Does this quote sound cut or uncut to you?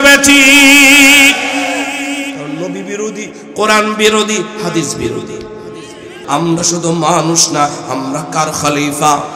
cut